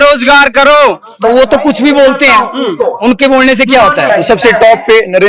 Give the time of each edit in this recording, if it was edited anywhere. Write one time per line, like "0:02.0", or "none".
0:04.1